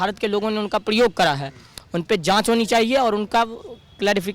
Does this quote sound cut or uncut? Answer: uncut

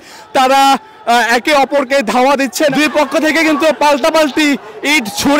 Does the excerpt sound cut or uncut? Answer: cut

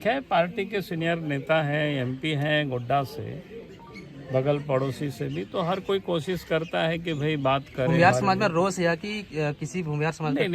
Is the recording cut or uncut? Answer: cut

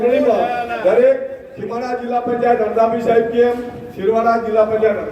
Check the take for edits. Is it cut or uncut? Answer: uncut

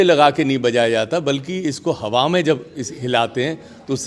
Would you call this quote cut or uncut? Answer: uncut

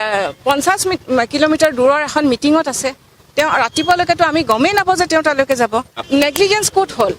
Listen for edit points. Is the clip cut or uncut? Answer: uncut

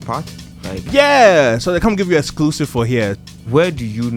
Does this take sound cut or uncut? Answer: cut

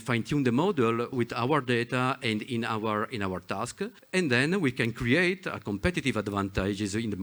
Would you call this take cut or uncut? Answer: cut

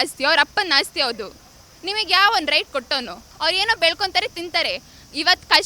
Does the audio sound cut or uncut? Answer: cut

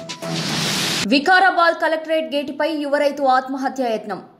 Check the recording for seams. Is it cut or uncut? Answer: cut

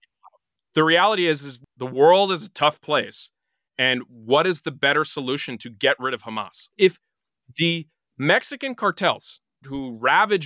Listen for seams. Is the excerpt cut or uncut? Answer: cut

